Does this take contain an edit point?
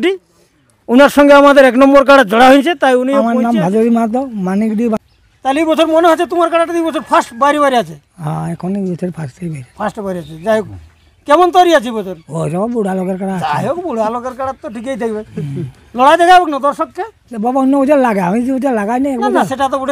yes; 2 cuts; at 3.2 s, 5.0 s

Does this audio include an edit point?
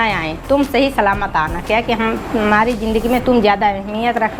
no; 0 cuts

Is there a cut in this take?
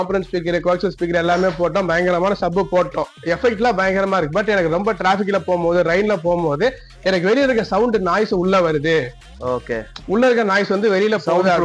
no; 0 cuts

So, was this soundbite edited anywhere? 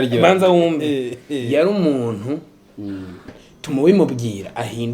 yes; 1 cut; at 3.3 s

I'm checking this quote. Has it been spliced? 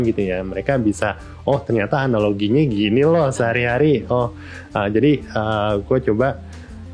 no; 0 cuts

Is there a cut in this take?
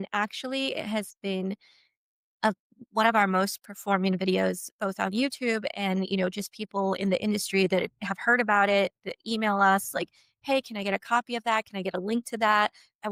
no; 0 cuts

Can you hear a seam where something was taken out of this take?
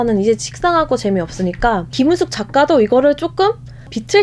no; 0 cuts

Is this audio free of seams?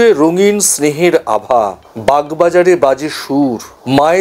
yes; 0 cuts

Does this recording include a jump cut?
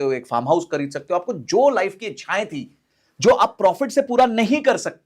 no; 0 cuts

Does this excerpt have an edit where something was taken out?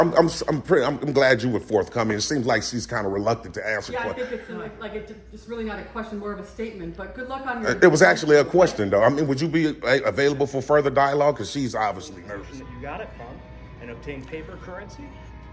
yes; 1 cut; at 12.1 s

